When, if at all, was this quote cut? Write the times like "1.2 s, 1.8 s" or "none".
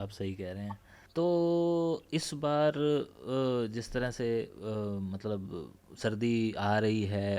1.0 s